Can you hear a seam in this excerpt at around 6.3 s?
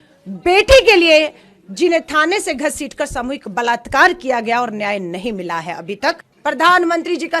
yes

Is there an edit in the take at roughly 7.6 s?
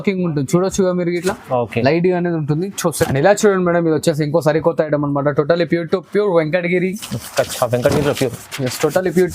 no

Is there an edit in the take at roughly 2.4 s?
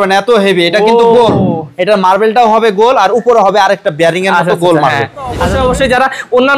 no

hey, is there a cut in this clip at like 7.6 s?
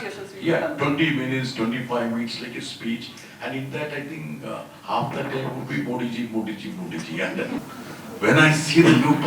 yes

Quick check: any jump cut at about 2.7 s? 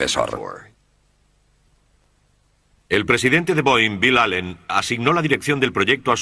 no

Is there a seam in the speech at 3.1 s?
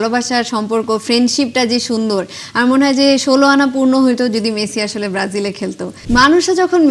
no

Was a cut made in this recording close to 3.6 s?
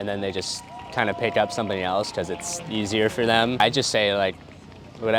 yes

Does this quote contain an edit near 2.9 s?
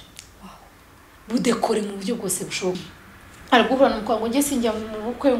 yes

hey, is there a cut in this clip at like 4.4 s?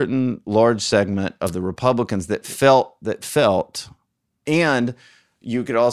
yes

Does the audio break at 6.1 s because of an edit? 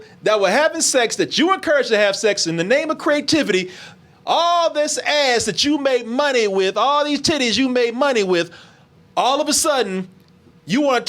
no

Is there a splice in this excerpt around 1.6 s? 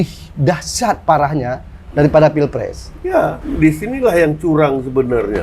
no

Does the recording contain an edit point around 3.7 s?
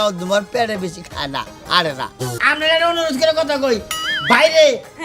no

